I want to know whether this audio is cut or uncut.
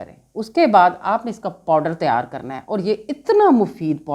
uncut